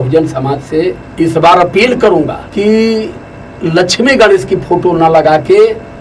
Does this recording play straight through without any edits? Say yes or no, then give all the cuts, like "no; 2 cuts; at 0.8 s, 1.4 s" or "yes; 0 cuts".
no; 2 cuts; at 1.0 s, 2.4 s